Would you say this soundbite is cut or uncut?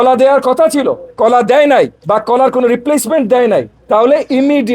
cut